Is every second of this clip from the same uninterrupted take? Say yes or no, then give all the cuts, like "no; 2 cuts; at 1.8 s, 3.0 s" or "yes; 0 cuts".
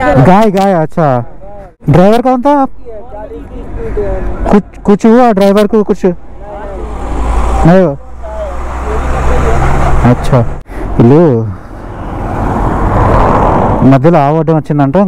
no; 2 cuts; at 1.8 s, 10.6 s